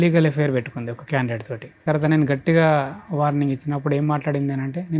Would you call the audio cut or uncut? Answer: cut